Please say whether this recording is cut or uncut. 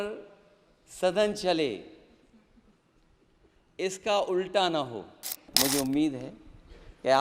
cut